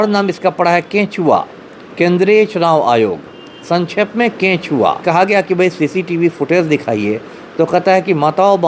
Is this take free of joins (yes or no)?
no